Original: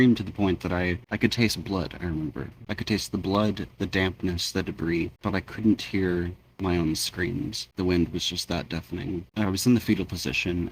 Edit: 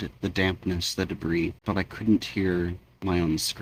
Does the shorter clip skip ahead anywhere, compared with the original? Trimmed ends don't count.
no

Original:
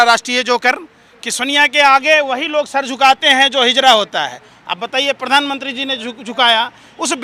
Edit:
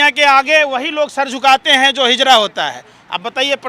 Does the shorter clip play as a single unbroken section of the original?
yes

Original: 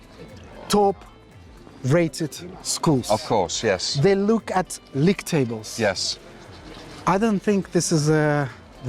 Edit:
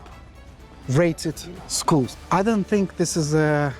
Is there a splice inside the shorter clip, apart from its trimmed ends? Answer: yes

